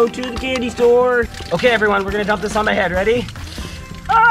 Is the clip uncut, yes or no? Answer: no